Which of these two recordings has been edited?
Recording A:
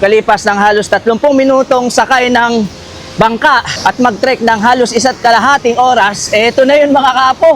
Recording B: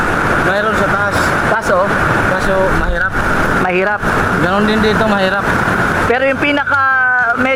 A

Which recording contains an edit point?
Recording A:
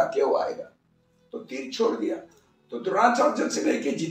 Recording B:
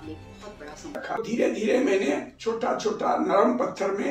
B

